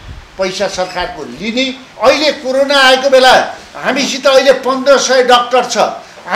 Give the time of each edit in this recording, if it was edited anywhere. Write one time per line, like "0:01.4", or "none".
0:01.9